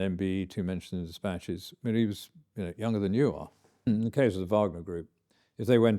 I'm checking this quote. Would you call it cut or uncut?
cut